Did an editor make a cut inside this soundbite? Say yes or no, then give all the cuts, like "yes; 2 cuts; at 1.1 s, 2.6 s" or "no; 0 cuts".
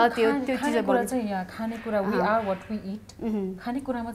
no; 0 cuts